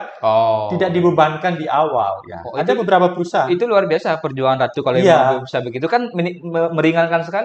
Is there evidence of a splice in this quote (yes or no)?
no